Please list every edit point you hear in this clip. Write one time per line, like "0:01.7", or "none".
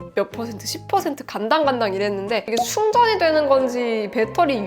0:02.5